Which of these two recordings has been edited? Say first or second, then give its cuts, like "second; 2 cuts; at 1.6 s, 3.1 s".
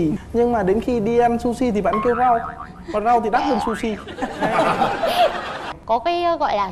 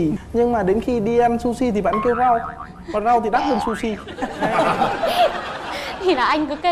first; 1 cut; at 5.7 s